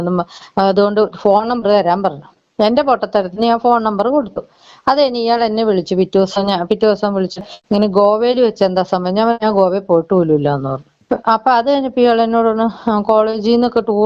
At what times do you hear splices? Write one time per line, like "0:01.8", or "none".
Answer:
0:07.4